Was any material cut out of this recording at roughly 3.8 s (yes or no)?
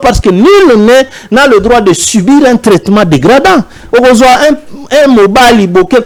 no